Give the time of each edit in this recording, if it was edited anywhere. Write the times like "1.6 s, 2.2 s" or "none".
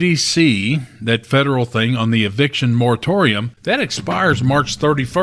3.5 s